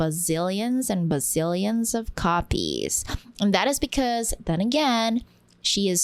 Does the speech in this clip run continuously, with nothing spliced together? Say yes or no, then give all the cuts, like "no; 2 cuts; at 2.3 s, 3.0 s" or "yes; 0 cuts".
yes; 0 cuts